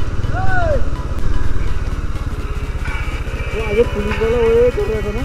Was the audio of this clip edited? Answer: no; 0 cuts

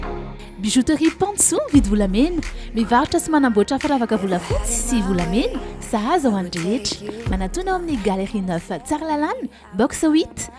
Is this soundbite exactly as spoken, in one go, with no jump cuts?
yes; 0 cuts

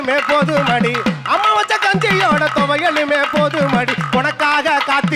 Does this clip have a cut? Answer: no; 0 cuts

